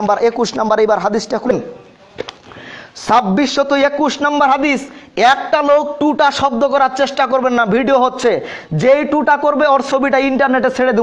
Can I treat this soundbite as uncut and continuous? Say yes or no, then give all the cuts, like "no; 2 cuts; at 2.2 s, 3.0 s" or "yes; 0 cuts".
no; 1 cut; at 1.5 s